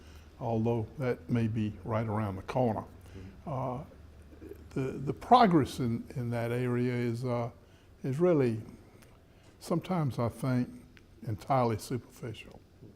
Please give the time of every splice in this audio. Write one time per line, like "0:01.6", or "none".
0:09.9

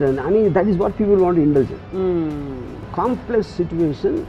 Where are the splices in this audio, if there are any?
0:02.9

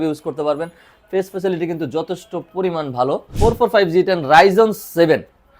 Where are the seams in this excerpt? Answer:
0:03.3

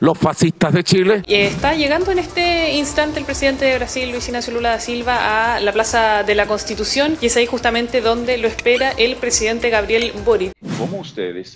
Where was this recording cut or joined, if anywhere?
0:01.2
0:07.2
0:10.6

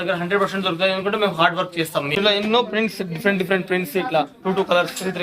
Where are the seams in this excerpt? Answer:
0:02.2

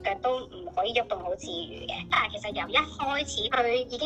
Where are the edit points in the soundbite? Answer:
0:02.1

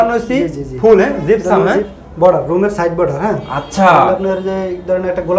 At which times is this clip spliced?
0:01.9

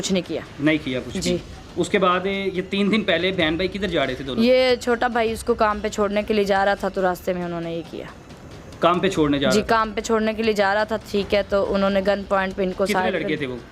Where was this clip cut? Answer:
none

